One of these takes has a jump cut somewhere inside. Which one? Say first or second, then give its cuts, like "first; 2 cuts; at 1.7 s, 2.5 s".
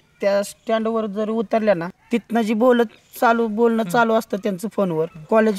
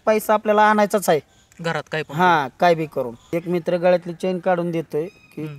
second; 1 cut; at 3.2 s